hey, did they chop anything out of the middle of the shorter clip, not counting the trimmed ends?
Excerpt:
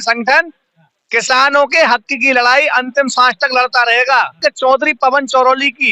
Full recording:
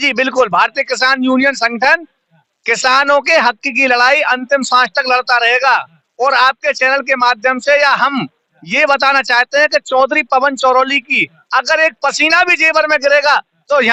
yes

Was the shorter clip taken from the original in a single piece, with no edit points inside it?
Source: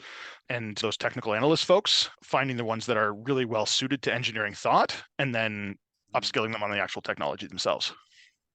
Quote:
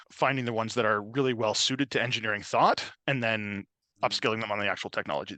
yes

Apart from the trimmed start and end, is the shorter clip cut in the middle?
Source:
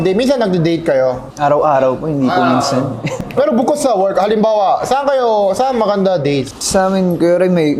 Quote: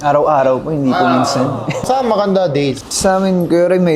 yes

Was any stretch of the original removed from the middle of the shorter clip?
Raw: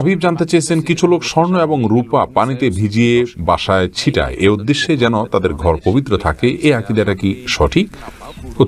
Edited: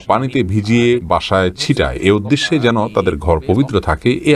yes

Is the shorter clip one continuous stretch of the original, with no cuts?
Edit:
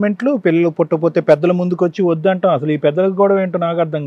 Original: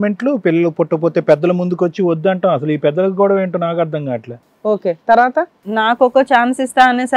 yes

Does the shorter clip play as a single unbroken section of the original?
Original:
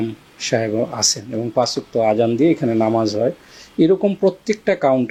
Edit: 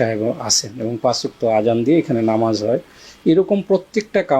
yes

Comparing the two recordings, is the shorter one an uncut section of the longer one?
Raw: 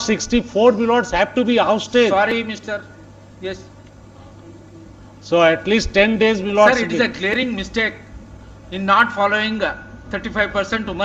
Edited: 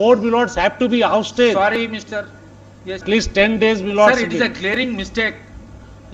no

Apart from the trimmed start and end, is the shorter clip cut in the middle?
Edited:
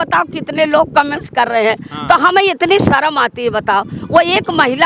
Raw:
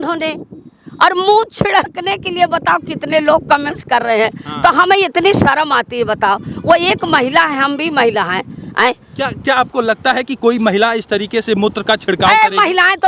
no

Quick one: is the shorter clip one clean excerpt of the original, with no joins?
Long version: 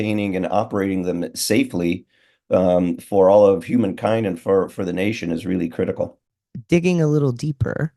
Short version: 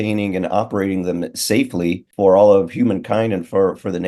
no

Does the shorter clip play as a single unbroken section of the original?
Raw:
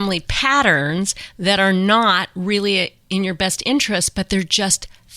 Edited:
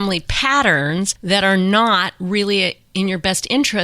no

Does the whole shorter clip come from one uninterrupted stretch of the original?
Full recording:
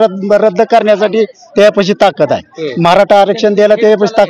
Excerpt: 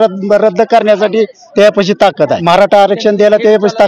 no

